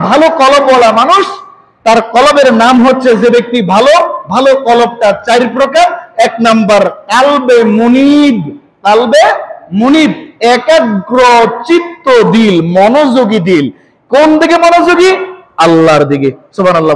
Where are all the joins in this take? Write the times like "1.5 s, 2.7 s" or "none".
none